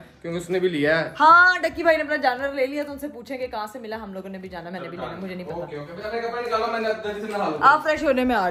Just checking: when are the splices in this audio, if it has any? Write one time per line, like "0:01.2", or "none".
none